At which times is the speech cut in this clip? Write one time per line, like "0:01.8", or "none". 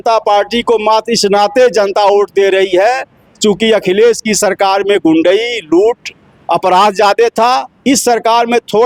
none